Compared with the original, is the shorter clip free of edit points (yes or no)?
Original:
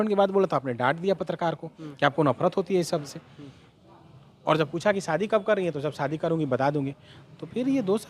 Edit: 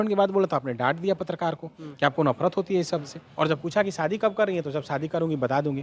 no